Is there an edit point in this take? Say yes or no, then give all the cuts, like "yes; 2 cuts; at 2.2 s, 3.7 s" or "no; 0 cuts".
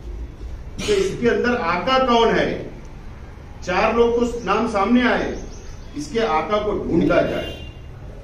yes; 1 cut; at 7.0 s